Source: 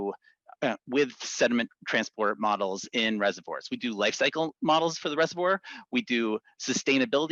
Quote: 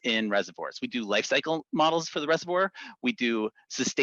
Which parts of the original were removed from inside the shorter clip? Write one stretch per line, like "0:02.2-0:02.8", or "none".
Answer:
none